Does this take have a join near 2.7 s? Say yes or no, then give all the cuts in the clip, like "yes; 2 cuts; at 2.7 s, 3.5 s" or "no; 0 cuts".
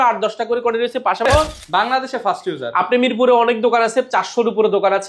no; 1 cut; at 1.3 s